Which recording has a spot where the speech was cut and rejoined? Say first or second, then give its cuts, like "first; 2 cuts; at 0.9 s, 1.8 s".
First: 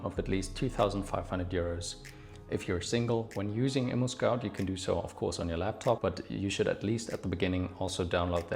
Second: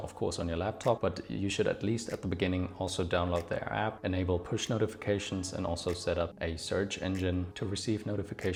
first; 1 cut; at 3.3 s